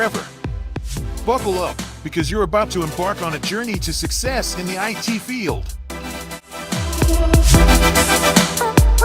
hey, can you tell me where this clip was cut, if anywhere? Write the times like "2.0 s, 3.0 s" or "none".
3.0 s